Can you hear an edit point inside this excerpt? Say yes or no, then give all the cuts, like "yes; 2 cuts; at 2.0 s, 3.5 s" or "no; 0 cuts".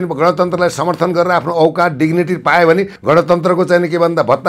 yes; 1 cut; at 2.9 s